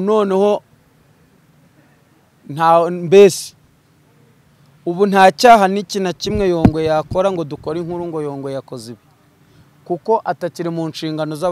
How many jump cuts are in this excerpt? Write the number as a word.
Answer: zero